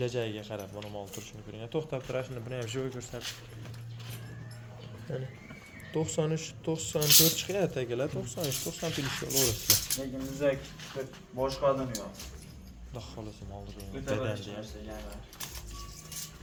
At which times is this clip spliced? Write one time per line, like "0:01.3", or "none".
none